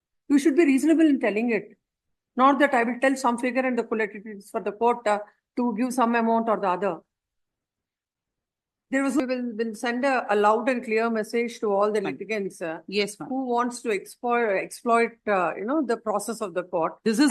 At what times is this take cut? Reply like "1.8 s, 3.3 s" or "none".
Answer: 9.2 s